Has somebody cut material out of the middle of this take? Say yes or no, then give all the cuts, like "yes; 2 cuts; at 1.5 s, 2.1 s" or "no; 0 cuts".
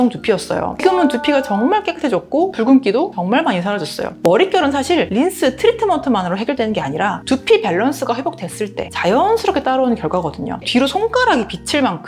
yes; 2 cuts; at 4.1 s, 10.6 s